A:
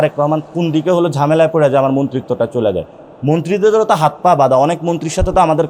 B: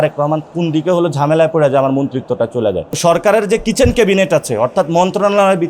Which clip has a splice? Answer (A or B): B